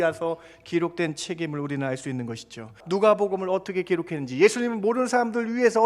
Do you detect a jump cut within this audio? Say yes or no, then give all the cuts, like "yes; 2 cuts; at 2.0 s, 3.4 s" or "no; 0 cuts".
yes; 1 cut; at 2.8 s